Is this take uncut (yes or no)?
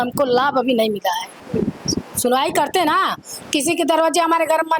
no